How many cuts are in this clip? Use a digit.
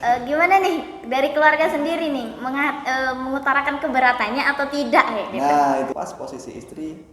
1